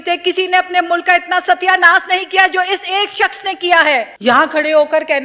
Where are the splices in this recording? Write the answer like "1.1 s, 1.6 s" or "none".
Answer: 4.1 s